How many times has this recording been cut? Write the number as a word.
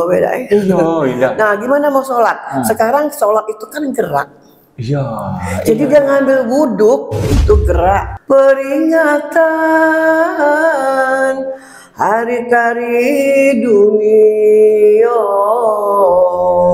one